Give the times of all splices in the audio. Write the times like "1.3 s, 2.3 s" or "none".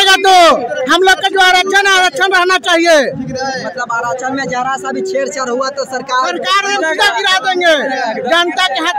none